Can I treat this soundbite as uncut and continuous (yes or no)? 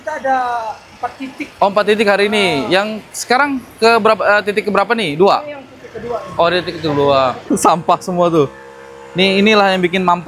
no